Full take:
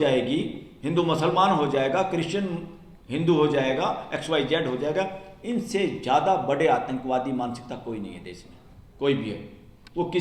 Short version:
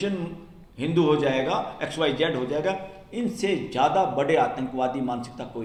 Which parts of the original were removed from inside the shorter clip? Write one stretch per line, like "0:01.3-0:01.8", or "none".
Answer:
none